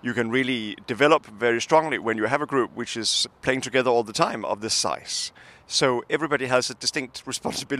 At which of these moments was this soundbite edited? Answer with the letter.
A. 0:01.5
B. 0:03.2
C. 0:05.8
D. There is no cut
B